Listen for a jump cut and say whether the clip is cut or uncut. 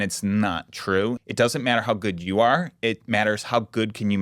cut